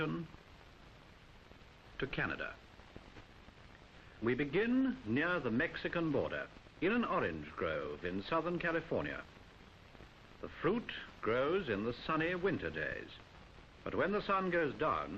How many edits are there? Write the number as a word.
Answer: one